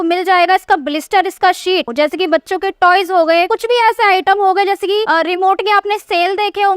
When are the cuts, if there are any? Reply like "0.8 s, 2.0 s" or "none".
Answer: 1.9 s, 3.5 s, 5.1 s